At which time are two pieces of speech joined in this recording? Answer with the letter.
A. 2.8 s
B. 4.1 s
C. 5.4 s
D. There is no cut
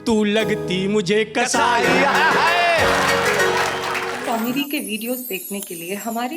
B